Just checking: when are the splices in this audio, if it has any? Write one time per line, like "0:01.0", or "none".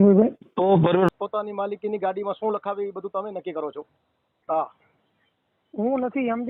0:01.1
0:04.3